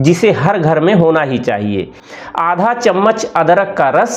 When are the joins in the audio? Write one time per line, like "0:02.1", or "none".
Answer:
0:02.0